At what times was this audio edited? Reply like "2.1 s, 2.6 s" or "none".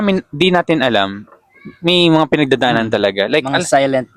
none